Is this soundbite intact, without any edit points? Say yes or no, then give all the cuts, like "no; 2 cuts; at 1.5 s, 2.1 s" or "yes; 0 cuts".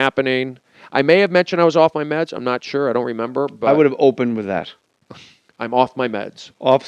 no; 1 cut; at 5.9 s